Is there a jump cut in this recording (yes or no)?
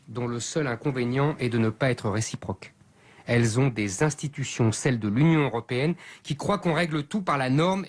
no